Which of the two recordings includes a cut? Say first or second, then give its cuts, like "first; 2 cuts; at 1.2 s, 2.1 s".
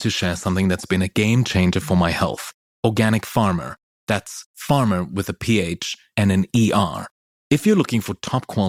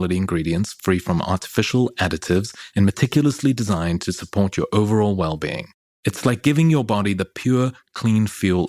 second; 1 cut; at 5.7 s